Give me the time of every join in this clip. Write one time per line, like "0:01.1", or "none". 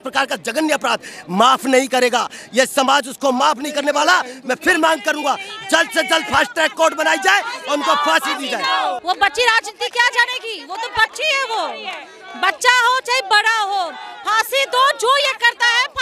none